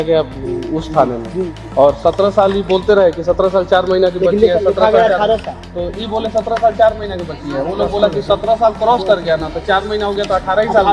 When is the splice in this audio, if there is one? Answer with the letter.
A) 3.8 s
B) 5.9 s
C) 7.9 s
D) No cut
D